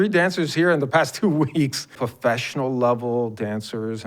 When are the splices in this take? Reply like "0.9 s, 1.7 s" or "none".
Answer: 2.0 s